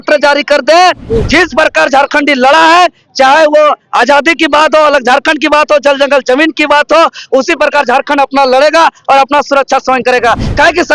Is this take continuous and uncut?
yes; 0 cuts

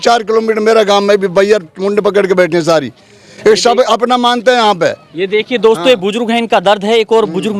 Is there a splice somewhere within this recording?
no; 0 cuts

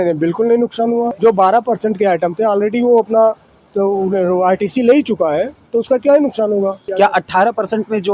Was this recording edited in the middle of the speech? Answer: yes; 2 cuts; at 1.1 s, 6.8 s

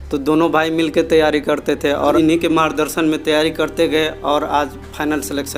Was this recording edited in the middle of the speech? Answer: yes; 1 cut; at 2.1 s

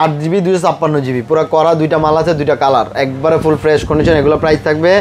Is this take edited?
no; 0 cuts

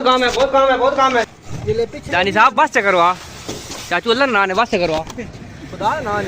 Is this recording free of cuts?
no; 1 cut; at 1.4 s

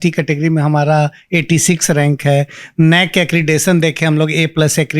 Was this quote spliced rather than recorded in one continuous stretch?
no; 0 cuts

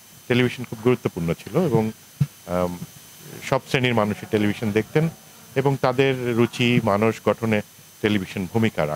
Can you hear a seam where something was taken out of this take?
no; 0 cuts

